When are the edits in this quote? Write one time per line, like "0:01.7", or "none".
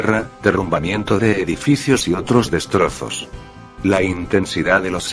0:04.2